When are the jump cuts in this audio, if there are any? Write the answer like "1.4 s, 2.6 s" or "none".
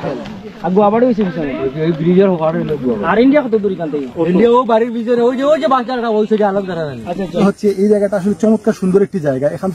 7.4 s